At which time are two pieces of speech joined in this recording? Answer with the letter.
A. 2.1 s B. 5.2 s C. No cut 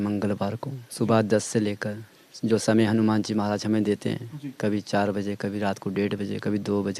C